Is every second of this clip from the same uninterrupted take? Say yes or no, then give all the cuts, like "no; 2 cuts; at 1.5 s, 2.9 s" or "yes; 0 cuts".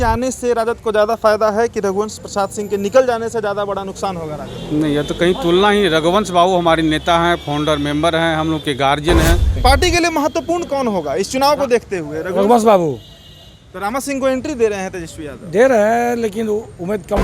no; 1 cut; at 9.5 s